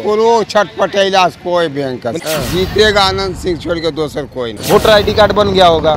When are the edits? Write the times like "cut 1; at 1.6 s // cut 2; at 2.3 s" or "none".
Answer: cut 1; at 2.2 s // cut 2; at 4.5 s